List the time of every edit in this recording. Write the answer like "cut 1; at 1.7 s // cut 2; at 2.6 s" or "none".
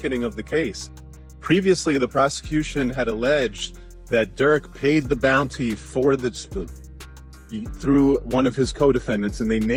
none